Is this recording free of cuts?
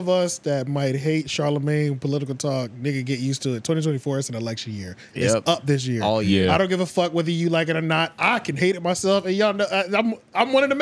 yes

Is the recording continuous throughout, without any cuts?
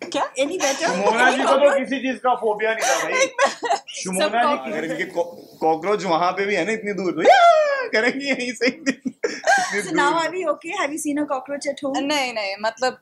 no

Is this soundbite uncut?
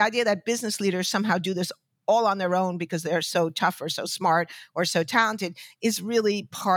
yes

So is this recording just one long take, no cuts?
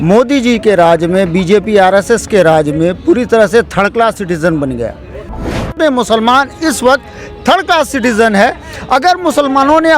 no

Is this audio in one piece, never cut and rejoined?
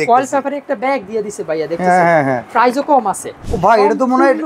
no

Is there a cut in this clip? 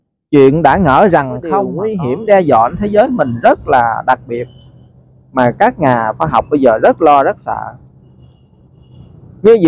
yes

